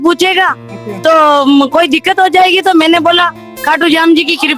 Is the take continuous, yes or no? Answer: yes